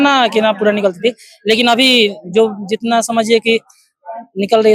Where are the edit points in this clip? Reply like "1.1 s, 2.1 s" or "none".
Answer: none